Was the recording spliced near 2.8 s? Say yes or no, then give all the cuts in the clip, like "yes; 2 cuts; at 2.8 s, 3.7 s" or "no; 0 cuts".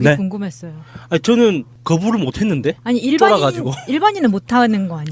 yes; 1 cut; at 2.8 s